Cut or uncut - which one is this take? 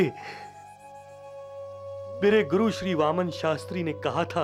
uncut